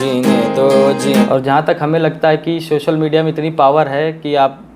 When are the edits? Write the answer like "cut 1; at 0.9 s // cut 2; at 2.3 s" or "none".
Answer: cut 1; at 1.3 s